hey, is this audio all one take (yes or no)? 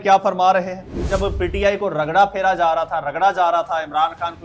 no